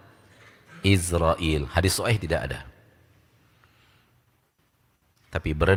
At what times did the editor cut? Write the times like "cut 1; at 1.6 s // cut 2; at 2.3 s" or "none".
none